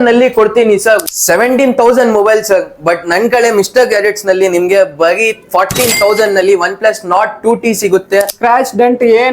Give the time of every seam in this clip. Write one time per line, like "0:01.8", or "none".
0:01.0
0:08.4